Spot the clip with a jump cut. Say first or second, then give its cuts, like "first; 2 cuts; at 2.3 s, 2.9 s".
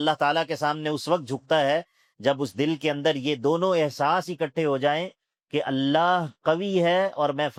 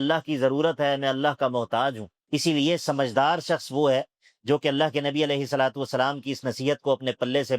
second; 1 cut; at 2.1 s